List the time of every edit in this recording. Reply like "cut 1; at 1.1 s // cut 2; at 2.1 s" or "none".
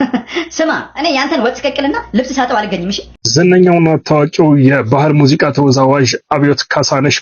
cut 1; at 3.1 s